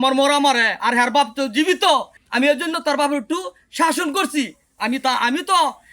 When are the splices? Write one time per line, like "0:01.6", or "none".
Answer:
0:02.2